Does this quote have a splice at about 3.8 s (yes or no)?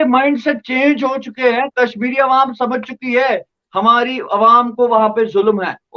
no